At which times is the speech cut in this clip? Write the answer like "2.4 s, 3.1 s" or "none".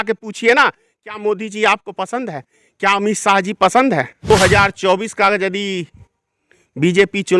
4.3 s